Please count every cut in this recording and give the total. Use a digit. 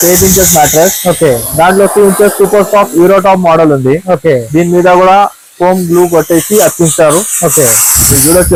0